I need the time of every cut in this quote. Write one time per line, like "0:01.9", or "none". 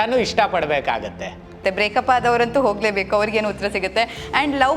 0:01.6